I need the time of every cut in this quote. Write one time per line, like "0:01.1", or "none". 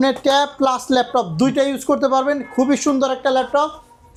none